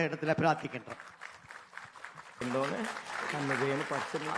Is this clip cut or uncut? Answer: cut